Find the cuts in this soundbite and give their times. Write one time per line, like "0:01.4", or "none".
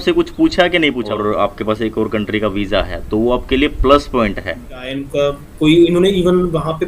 0:01.0
0:05.0